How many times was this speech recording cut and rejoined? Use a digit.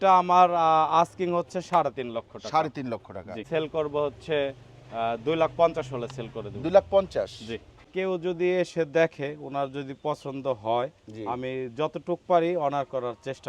2